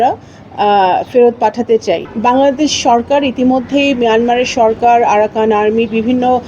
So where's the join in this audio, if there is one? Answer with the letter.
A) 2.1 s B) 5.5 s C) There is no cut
A